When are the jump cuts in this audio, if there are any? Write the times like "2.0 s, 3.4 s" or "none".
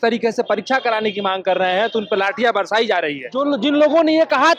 3.2 s

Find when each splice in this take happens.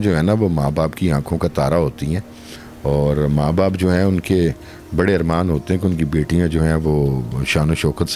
none

